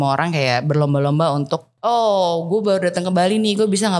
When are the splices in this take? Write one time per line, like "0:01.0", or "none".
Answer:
0:01.7